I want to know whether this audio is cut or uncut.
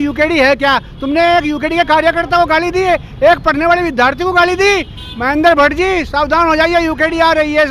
uncut